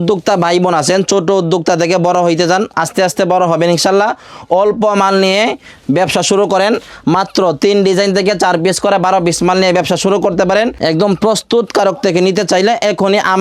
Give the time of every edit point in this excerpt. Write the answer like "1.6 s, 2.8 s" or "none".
10.8 s